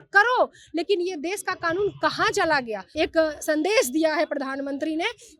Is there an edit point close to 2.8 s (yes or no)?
yes